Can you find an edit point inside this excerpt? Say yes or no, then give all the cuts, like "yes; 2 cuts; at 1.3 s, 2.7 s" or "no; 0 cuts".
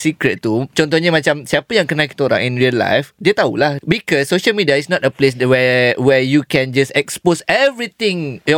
yes; 1 cut; at 3.8 s